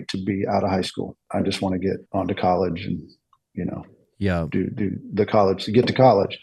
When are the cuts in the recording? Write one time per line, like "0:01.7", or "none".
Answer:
0:01.2
0:02.0